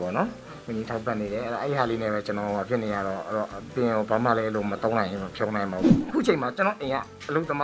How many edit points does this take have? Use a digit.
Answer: 1